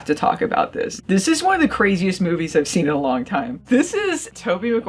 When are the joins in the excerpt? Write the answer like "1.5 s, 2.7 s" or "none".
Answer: 0.9 s, 3.6 s

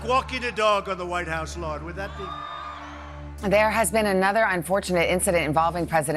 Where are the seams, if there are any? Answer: 3.3 s

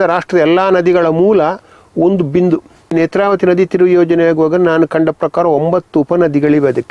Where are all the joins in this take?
2.9 s

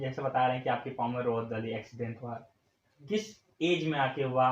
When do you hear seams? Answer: none

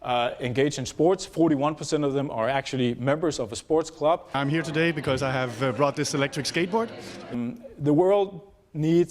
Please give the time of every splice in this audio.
4.3 s, 7.3 s

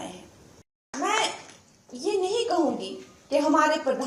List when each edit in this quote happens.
0.9 s

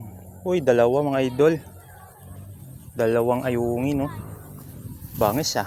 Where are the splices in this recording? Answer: none

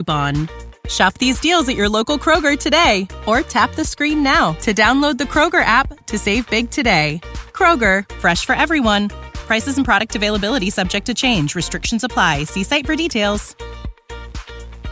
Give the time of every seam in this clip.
none

